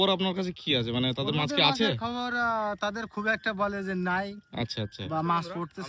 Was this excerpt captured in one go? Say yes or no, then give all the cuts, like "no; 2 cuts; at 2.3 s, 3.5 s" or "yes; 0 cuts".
yes; 0 cuts